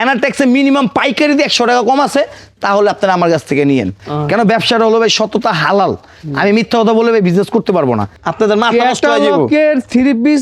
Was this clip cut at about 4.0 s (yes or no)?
yes